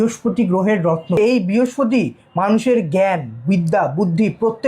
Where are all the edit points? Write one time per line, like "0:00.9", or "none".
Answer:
0:01.2